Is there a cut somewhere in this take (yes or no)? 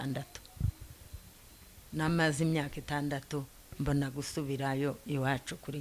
no